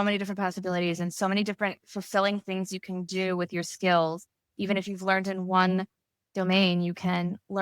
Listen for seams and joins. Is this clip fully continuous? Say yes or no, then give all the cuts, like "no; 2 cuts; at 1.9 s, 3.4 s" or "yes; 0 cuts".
yes; 0 cuts